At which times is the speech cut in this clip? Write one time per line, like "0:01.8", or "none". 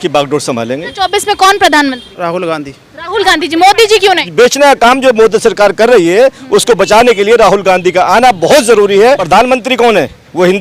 0:00.9
0:02.1
0:04.3
0:09.2